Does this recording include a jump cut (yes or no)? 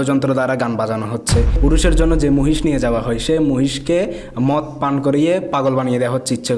yes